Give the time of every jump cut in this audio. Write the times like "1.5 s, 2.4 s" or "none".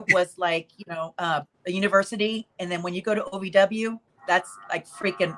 1.5 s, 4.1 s